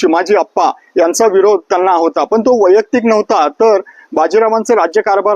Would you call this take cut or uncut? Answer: uncut